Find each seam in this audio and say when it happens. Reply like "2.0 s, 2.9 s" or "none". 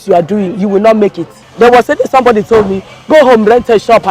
1.4 s

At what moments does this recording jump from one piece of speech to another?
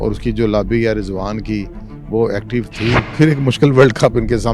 3.1 s

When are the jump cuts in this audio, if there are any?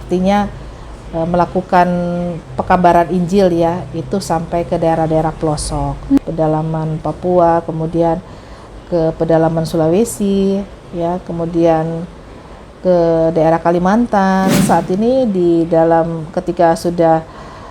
6.2 s, 14.6 s

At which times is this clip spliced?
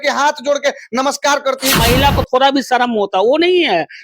1.8 s

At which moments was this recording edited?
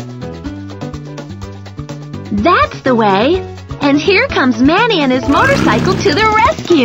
2.3 s

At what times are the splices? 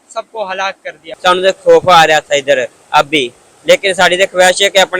1.1 s, 3.6 s

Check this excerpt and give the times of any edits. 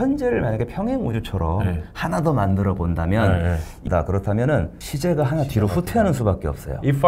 3.8 s, 4.8 s

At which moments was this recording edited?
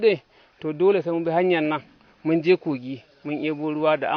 none

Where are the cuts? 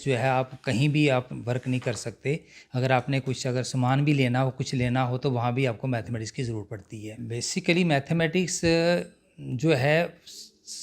7.2 s

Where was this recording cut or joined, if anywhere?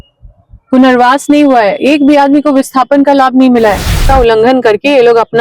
4.0 s

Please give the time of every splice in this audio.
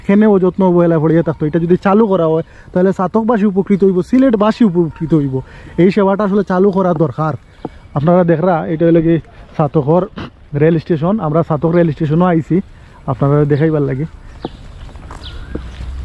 none

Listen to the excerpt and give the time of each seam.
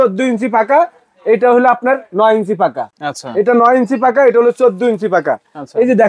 none

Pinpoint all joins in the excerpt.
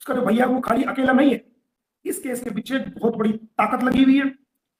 none

